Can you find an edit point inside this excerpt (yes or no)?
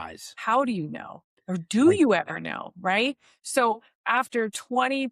no